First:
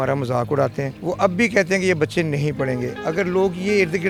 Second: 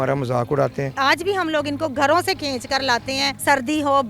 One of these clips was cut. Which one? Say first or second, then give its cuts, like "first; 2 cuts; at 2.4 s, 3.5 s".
second; 1 cut; at 1.0 s